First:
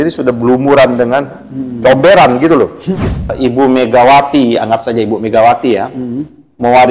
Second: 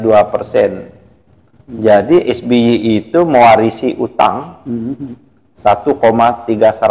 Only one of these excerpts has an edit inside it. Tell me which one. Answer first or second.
first